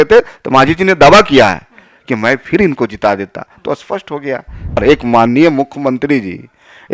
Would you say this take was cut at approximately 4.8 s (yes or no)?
yes